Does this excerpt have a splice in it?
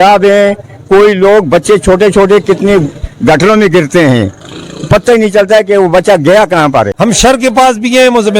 yes; 1 cut; at 6.9 s

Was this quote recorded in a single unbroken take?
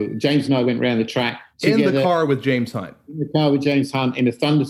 yes; 0 cuts

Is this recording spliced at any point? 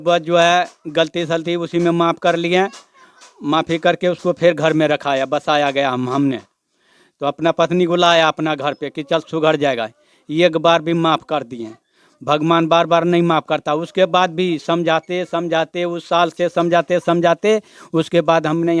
no; 0 cuts

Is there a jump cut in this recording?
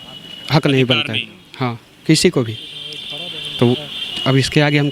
no; 0 cuts

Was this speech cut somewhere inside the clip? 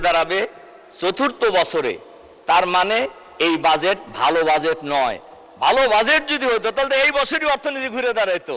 no; 0 cuts

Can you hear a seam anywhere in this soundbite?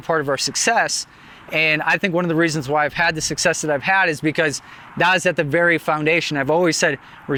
no; 0 cuts

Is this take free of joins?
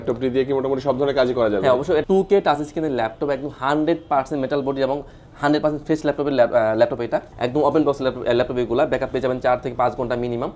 no; 2 cuts; at 2.0 s, 7.3 s

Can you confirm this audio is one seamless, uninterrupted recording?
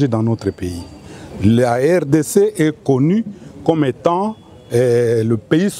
yes; 0 cuts

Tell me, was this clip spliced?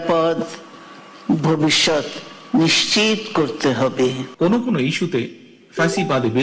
yes; 1 cut; at 4.2 s

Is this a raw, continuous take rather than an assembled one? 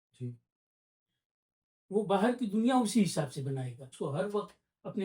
no; 1 cut; at 3.8 s

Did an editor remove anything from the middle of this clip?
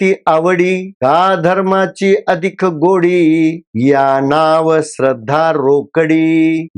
no; 0 cuts

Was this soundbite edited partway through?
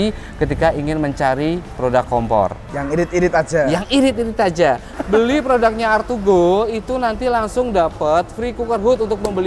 yes; 1 cut; at 4.9 s

